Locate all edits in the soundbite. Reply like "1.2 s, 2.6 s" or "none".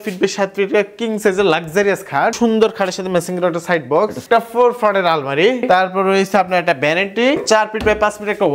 2.4 s, 4.2 s, 5.6 s, 7.4 s